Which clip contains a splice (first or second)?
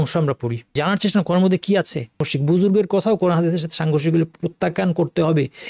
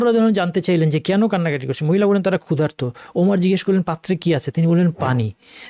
first